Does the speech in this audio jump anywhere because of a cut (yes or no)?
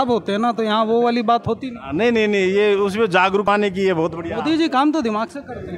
yes